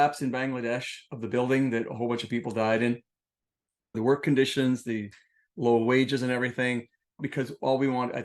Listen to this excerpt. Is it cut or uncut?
cut